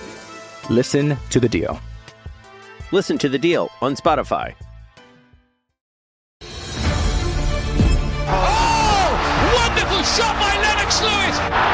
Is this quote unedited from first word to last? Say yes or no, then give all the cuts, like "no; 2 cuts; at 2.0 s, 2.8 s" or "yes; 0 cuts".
no; 1 cut; at 6.3 s